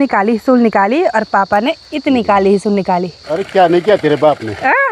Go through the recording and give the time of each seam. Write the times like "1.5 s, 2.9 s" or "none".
3.2 s